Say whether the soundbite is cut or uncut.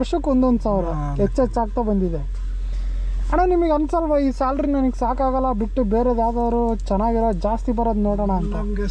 uncut